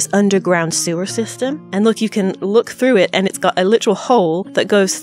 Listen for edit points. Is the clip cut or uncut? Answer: uncut